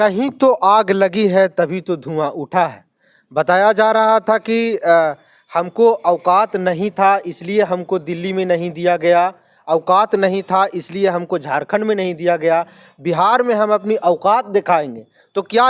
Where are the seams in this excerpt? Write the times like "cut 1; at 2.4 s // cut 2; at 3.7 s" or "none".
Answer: none